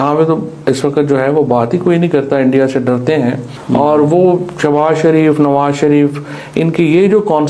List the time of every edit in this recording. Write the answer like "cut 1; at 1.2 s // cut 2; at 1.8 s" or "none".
cut 1; at 3.6 s